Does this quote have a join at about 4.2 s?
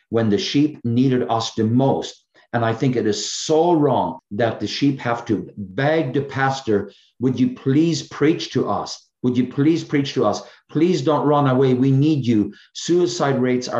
yes; 1 cut; at 4.2 s

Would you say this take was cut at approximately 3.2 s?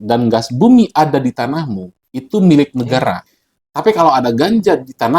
yes; 1 cut; at 3.2 s

